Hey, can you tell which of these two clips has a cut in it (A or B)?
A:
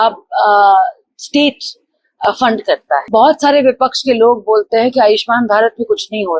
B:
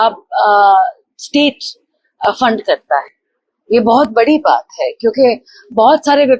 A